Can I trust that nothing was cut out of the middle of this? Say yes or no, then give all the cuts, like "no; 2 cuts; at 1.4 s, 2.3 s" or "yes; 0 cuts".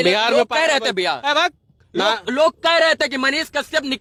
yes; 0 cuts